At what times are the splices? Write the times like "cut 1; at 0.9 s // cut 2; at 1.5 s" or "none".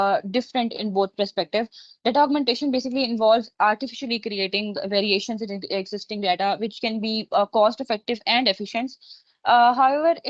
none